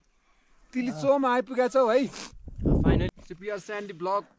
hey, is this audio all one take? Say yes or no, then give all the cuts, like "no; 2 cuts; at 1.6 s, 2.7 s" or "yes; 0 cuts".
no; 1 cut; at 3.1 s